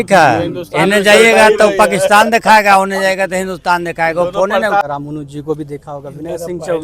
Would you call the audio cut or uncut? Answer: cut